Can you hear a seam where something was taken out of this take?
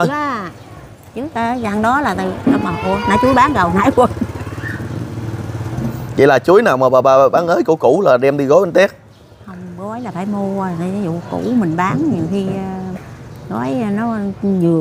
no; 0 cuts

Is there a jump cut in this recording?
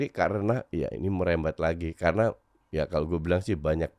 no; 0 cuts

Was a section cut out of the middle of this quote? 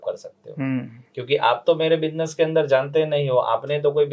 no; 0 cuts

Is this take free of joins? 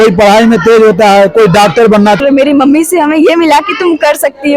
no; 1 cut; at 2.2 s

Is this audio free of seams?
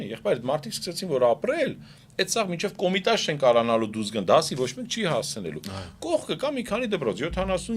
yes; 0 cuts

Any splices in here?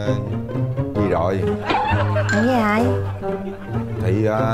no; 0 cuts

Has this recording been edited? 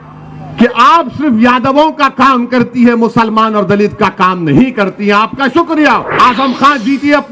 yes; 1 cut; at 6.1 s

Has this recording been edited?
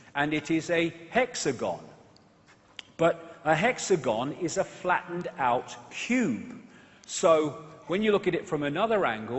yes; 1 cut; at 5.1 s

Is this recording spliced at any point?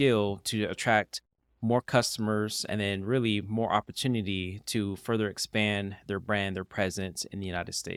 no; 0 cuts

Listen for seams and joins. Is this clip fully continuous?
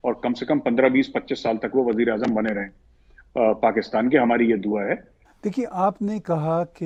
yes; 0 cuts

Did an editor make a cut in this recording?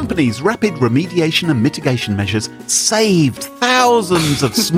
no; 0 cuts

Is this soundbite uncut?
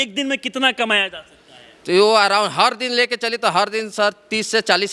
yes; 0 cuts

